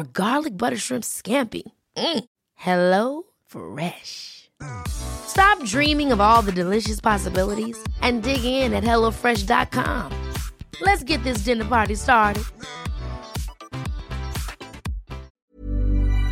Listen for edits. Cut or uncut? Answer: cut